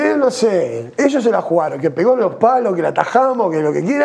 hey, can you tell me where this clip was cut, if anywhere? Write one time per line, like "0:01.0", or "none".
none